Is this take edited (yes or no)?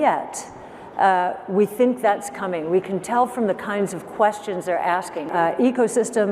yes